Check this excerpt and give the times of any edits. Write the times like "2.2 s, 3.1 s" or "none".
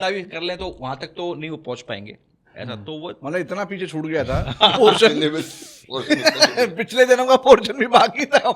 none